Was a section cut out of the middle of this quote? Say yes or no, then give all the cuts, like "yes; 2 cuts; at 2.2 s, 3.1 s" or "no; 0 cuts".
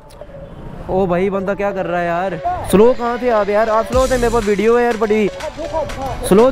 yes; 1 cut; at 2.4 s